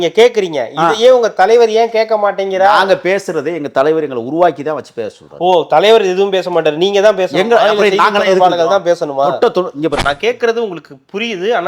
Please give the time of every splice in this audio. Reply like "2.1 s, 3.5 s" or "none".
10.0 s